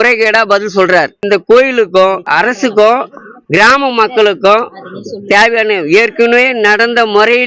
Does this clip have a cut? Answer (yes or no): yes